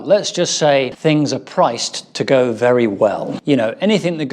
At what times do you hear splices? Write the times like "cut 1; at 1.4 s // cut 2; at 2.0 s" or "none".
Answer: cut 1; at 0.9 s // cut 2; at 3.3 s